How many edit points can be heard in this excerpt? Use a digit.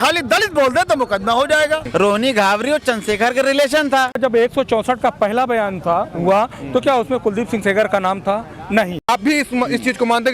3